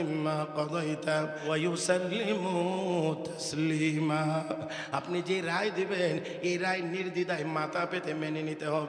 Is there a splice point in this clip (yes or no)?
yes